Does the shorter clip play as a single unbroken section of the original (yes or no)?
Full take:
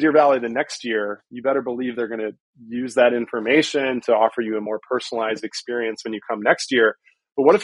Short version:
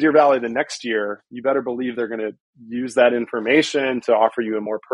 yes